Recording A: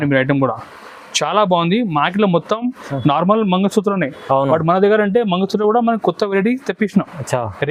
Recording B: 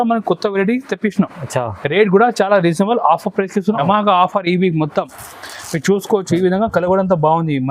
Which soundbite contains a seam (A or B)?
B